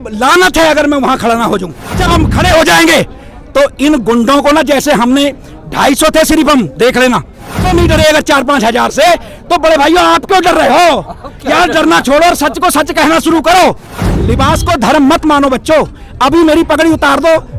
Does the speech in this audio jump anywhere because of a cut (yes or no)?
yes